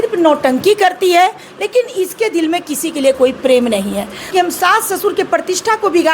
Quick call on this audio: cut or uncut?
cut